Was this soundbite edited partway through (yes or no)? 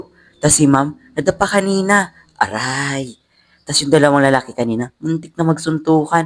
no